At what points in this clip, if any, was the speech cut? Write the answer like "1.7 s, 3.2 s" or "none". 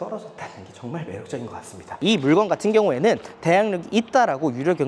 2.0 s